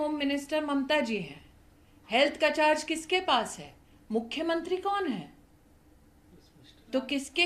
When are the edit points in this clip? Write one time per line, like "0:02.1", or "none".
none